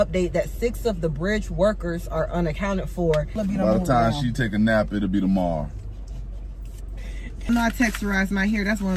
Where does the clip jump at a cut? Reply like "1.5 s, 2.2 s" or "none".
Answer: 3.4 s, 7.5 s